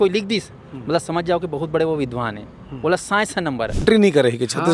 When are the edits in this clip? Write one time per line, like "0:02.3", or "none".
0:03.8

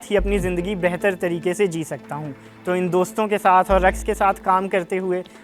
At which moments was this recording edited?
none

